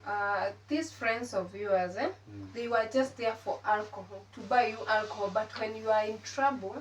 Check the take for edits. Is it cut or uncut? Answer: uncut